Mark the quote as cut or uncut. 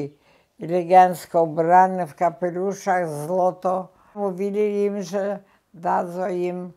cut